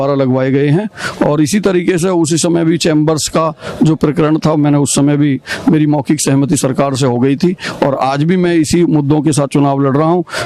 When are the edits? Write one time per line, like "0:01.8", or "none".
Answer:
none